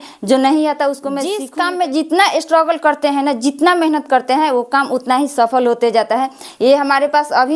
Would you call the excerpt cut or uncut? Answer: cut